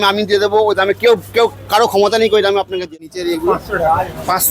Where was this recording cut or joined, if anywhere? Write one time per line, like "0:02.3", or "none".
0:03.1